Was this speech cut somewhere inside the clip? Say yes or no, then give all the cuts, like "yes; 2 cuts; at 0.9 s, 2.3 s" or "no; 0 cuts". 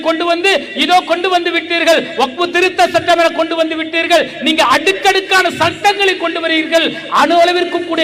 no; 0 cuts